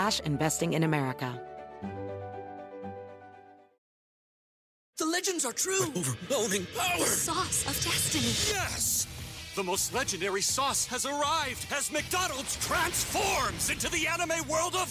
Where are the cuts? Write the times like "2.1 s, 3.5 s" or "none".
1.4 s